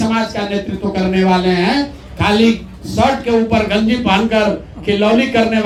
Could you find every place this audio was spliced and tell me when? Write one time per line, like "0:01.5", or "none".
none